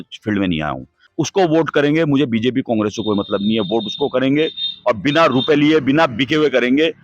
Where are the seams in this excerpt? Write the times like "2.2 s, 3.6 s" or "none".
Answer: 1.0 s